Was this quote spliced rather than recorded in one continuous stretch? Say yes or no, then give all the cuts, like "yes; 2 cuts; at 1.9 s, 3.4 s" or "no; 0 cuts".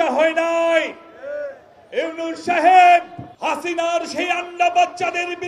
yes; 1 cut; at 3.2 s